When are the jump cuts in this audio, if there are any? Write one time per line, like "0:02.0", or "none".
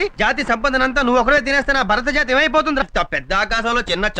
0:02.8